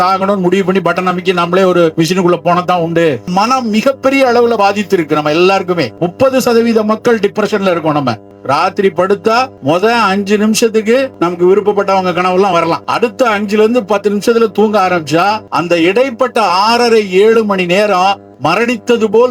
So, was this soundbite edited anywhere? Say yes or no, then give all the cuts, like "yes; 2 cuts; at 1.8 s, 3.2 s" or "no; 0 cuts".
yes; 9 cuts; at 1.9 s, 3.3 s, 6.0 s, 8.3 s, 9.5 s, 11.1 s, 12.9 s, 15.5 s, 18.3 s